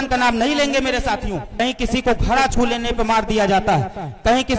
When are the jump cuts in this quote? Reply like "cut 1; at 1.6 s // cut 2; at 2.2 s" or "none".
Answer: cut 1; at 1.5 s